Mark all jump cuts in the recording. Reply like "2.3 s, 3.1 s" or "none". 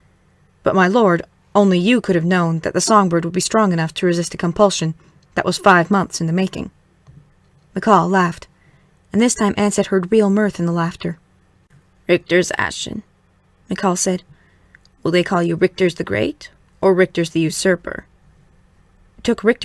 18.7 s

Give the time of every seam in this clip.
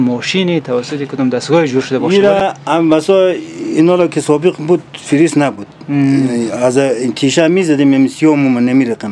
none

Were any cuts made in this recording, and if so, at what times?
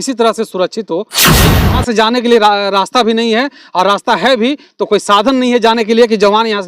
1.4 s

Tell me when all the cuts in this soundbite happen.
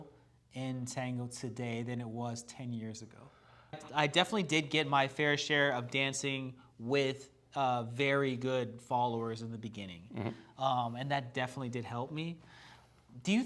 3.8 s

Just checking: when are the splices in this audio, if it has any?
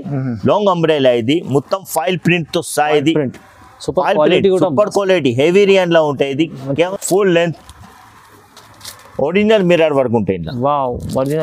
6.9 s

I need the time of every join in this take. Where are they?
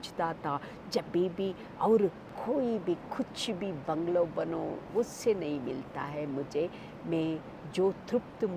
2.2 s

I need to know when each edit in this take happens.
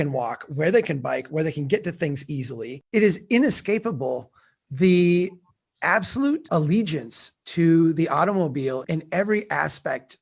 2.8 s, 6.5 s, 8.8 s

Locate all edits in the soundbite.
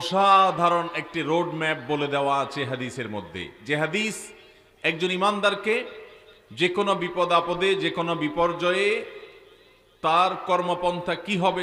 none

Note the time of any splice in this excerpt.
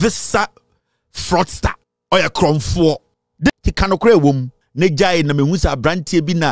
3.5 s

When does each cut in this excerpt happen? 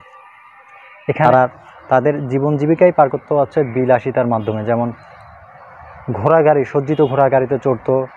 1.2 s

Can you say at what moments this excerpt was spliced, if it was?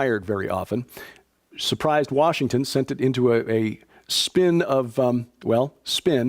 2.7 s

